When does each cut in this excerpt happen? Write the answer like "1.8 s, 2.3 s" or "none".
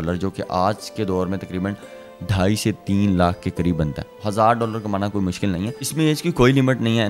5.8 s